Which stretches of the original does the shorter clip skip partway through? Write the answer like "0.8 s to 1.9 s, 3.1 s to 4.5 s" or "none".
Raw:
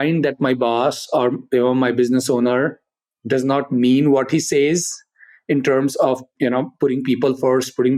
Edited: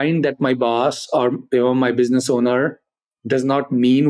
none